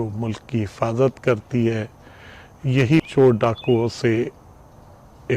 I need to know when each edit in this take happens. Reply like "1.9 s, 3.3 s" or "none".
3.1 s